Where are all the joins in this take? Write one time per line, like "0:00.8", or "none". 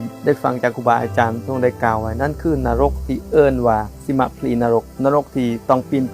0:04.9